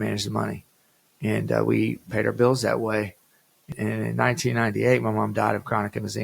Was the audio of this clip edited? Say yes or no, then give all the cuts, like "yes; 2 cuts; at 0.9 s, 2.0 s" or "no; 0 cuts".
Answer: yes; 1 cut; at 3.7 s